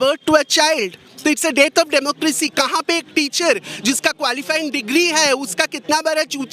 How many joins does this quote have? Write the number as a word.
zero